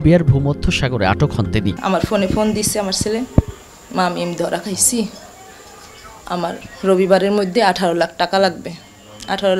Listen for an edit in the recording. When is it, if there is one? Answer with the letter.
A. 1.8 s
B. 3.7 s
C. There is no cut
A